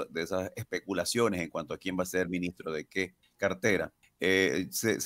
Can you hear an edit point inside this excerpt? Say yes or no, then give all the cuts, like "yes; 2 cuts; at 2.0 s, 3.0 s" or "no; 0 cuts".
yes; 2 cuts; at 3.2 s, 4.0 s